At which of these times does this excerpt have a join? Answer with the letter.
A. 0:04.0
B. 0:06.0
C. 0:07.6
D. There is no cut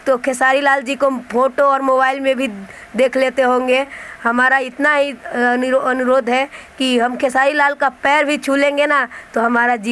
A